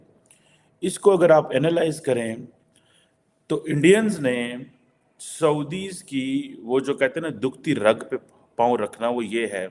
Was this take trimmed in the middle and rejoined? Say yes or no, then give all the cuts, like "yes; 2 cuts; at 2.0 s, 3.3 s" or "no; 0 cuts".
no; 0 cuts